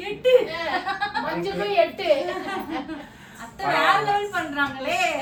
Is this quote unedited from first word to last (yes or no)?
yes